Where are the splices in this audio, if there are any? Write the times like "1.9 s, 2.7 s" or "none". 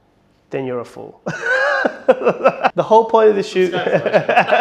2.7 s